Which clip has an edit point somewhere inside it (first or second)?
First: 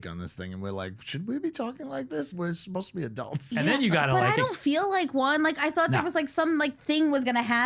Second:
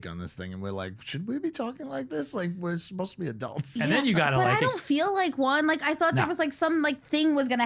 first